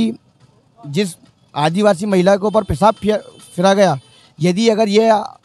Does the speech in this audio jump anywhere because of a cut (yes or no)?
no